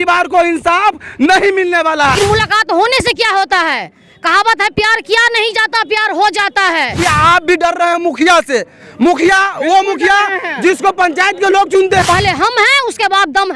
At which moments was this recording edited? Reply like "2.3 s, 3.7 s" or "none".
2.2 s, 7.0 s, 12.0 s

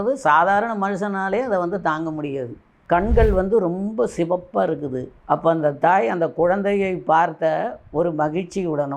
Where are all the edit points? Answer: 2.7 s

